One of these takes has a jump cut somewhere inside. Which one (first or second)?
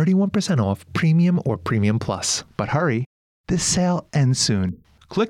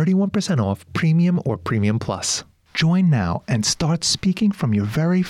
first